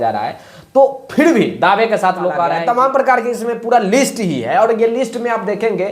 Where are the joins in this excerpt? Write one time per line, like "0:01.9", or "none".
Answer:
0:02.5